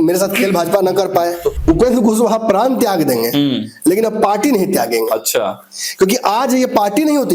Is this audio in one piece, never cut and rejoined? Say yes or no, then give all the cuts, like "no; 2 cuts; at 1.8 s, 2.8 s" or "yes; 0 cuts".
no; 1 cut; at 1.6 s